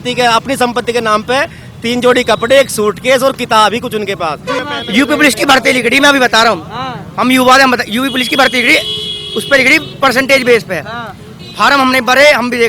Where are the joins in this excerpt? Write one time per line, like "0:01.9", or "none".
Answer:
0:04.6